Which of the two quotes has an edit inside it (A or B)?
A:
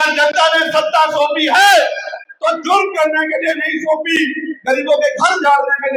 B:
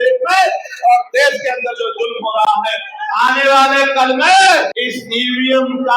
B